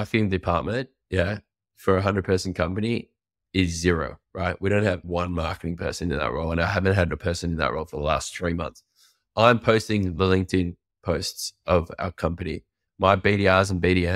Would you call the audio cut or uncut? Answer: uncut